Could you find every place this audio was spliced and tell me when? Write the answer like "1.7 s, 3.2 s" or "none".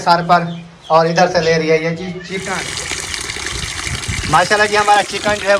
2.5 s